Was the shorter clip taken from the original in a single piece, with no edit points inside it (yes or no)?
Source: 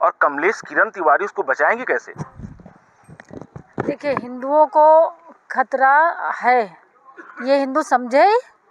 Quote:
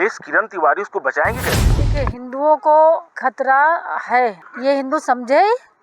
no